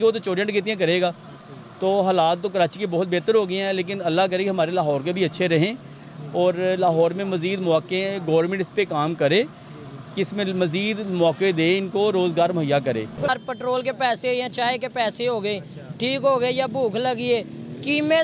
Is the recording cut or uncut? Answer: cut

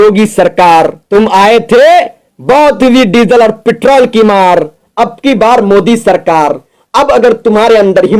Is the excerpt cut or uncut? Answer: cut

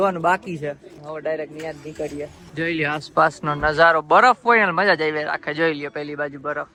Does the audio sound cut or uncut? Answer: uncut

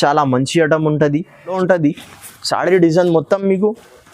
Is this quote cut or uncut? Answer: cut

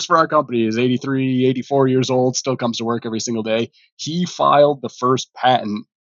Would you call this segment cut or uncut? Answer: uncut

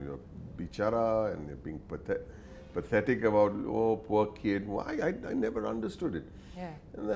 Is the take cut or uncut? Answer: uncut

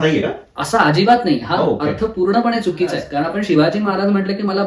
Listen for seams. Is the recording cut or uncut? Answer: cut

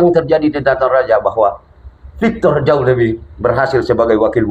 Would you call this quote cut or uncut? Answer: uncut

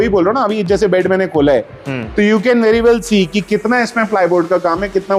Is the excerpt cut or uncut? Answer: uncut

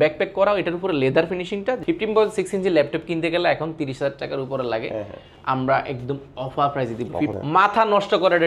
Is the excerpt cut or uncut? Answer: cut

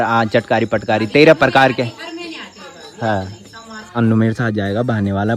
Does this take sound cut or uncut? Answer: cut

